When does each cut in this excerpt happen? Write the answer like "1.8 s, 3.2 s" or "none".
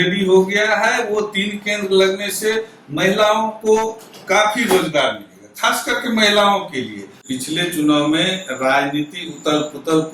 7.2 s